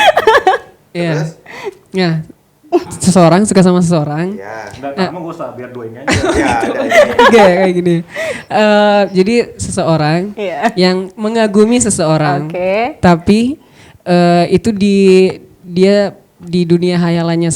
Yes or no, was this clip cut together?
no